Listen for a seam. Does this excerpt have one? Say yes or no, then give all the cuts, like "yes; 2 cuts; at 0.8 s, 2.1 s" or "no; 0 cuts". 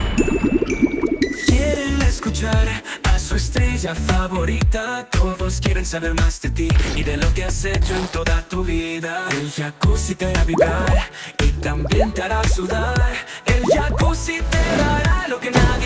no; 0 cuts